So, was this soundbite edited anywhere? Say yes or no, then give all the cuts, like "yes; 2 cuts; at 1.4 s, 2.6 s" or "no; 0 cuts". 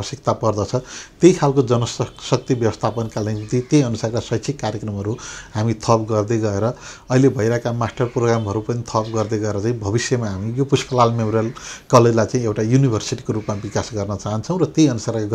no; 0 cuts